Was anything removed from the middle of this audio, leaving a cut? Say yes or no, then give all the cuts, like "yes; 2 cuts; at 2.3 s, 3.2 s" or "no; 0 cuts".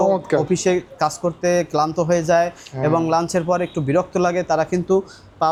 no; 0 cuts